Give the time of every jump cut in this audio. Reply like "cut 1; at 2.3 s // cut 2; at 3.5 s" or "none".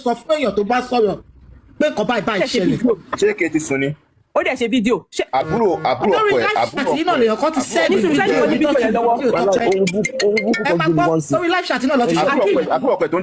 none